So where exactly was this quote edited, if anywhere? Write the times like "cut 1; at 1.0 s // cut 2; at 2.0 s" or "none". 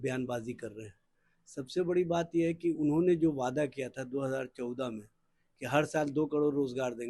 none